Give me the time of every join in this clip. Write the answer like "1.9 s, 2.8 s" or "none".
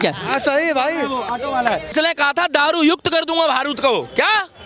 1.9 s